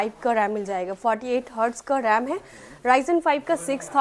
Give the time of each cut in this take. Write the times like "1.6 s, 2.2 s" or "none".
none